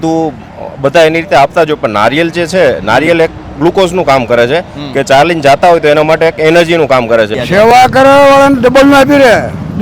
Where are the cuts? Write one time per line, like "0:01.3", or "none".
0:07.4